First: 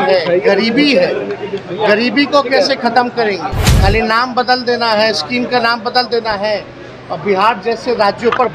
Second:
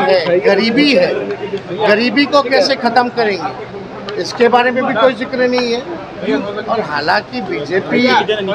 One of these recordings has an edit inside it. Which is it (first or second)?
first